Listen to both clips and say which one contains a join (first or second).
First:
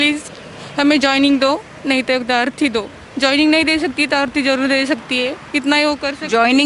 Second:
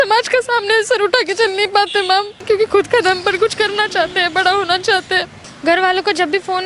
second